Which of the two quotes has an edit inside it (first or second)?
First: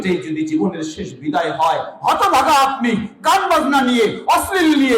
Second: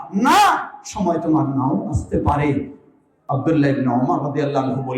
second